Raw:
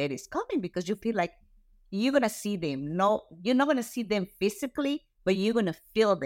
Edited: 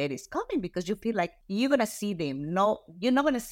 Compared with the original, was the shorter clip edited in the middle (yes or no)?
yes